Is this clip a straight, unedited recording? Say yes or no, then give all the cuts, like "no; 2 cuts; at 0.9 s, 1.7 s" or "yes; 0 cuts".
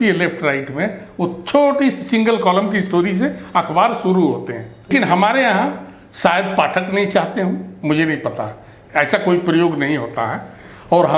no; 1 cut; at 4.9 s